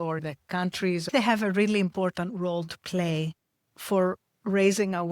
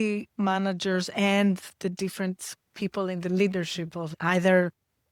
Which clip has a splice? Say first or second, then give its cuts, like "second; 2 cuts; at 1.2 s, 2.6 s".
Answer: first; 1 cut; at 1.1 s